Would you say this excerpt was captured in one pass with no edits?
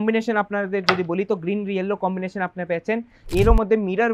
no; 1 cut; at 3.2 s

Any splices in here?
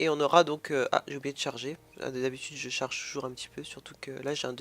yes; 1 cut; at 2.1 s

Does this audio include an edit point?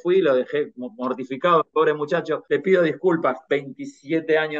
no; 0 cuts

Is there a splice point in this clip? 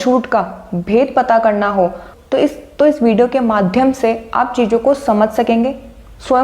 no; 0 cuts

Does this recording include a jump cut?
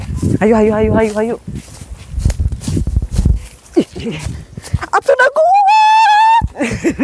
yes; 1 cut; at 3.4 s

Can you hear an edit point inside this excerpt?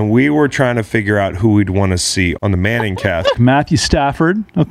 yes; 2 cuts; at 2.4 s, 3.4 s

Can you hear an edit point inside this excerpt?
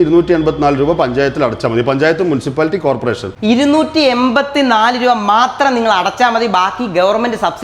no; 0 cuts

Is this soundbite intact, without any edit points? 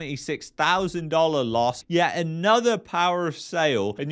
yes; 0 cuts

